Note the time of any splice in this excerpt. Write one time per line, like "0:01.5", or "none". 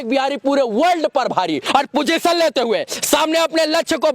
0:01.6

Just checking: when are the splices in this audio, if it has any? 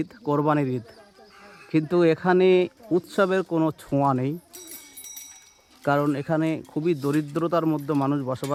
none

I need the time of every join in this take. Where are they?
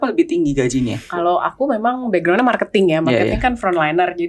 0:01.0

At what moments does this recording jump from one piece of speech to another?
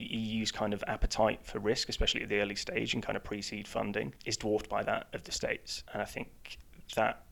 0:04.2
0:05.8

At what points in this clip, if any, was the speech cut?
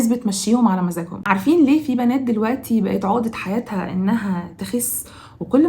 0:01.2

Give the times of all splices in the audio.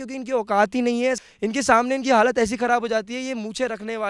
0:01.2

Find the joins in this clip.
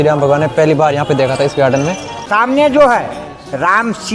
0:02.3

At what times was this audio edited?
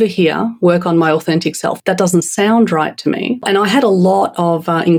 0:01.8
0:03.5

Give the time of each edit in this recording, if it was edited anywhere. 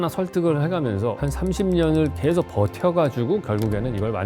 0:01.2

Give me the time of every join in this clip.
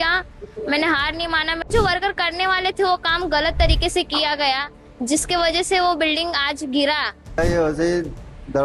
0:01.7
0:07.4

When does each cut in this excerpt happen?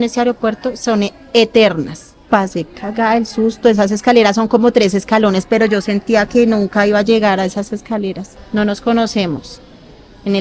0:02.2
0:08.3

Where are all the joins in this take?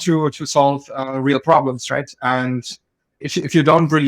0:03.2

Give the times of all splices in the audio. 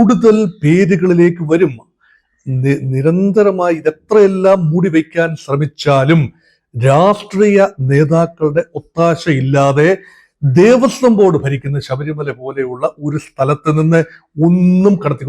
none

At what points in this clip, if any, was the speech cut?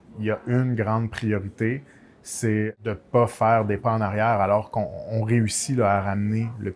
0:02.7

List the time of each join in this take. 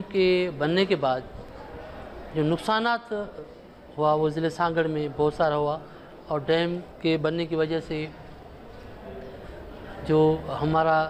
none

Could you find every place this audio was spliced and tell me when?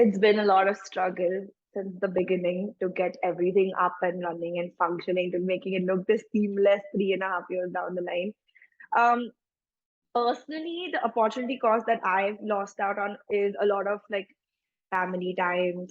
none

